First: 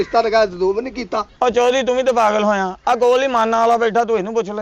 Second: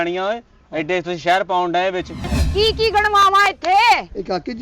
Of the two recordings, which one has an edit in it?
second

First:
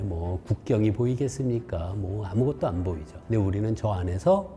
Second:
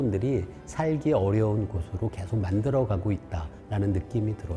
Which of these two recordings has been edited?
first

